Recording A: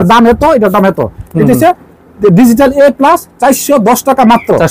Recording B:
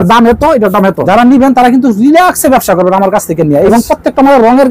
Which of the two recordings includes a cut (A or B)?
B